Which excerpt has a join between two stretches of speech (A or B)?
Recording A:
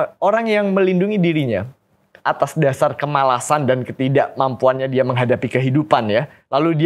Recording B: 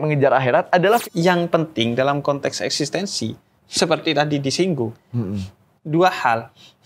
B